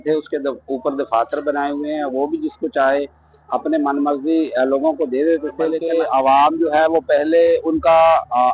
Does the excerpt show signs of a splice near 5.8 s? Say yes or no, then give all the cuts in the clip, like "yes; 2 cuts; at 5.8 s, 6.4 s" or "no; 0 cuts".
yes; 1 cut; at 5.8 s